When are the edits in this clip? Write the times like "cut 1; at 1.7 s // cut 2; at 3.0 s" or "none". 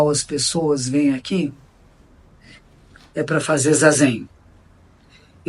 none